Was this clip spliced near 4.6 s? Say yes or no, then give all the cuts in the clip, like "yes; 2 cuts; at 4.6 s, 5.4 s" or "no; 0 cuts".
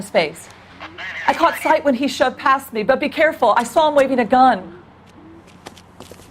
yes; 1 cut; at 4.6 s